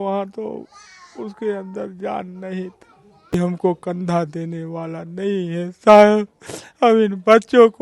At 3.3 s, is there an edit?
yes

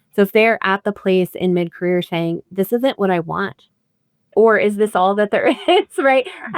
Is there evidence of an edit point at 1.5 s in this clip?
no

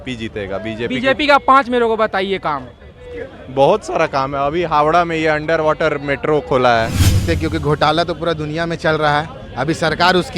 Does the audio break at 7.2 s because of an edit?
yes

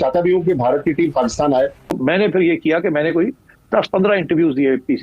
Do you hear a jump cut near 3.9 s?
no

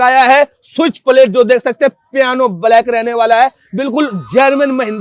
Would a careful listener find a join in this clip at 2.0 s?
no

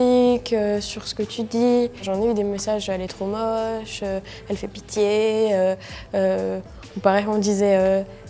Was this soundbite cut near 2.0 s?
yes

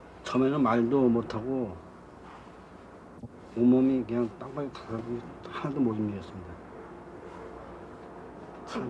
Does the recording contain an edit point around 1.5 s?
no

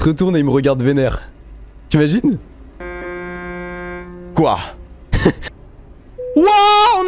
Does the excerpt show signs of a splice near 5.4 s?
yes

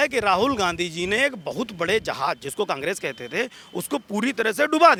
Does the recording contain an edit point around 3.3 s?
no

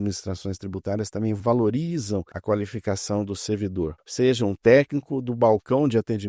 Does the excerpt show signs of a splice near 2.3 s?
yes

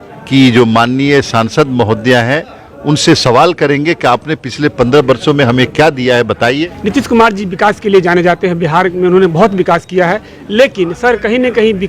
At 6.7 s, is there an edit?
yes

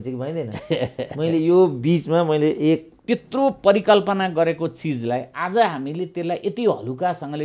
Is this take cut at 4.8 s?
no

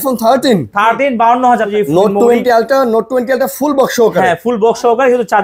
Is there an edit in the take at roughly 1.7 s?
yes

